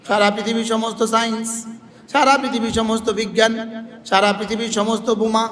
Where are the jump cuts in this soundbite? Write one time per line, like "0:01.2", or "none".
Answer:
none

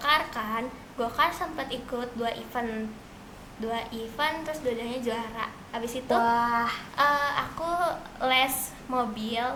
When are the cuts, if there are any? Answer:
none

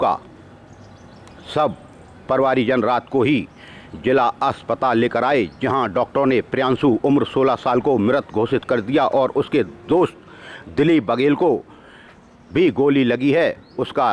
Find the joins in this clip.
none

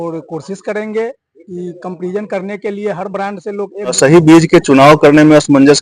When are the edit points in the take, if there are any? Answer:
0:03.9

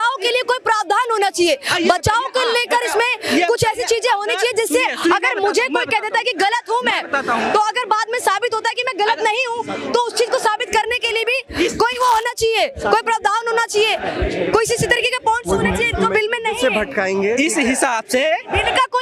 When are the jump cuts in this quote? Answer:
none

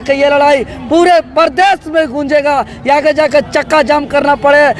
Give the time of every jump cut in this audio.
none

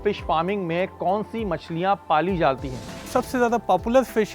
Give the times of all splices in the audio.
0:03.0

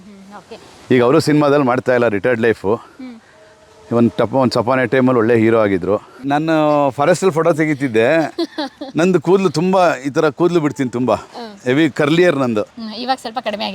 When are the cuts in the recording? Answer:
0:06.1

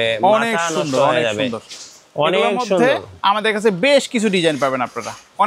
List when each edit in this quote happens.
none

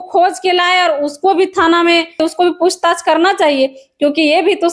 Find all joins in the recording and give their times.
0:02.2

